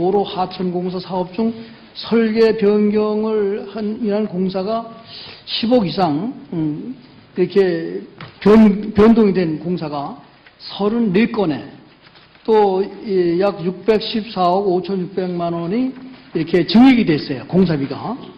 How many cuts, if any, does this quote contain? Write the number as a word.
zero